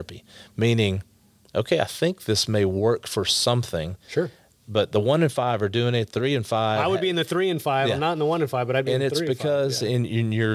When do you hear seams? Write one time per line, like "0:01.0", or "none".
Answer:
none